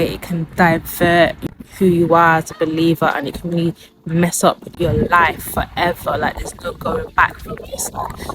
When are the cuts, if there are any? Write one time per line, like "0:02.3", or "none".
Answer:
0:01.4
0:04.7